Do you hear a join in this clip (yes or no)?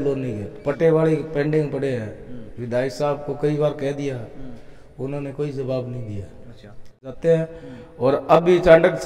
yes